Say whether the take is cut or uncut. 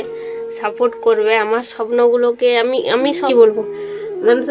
cut